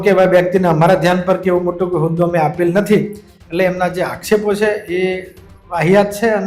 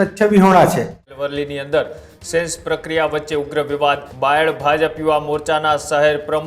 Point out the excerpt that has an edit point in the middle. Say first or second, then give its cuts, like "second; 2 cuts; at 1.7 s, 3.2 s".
second; 2 cuts; at 1.2 s, 4.1 s